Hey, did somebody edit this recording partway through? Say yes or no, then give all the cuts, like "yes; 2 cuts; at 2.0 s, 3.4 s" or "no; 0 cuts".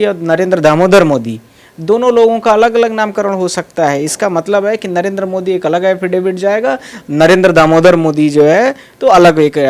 no; 0 cuts